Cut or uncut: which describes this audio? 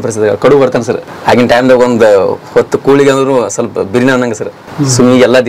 cut